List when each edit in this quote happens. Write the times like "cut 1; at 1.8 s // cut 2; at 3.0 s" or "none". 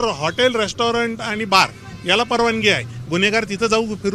none